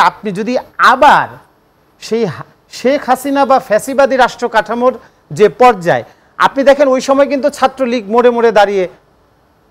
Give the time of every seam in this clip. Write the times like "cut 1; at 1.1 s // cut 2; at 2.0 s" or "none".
none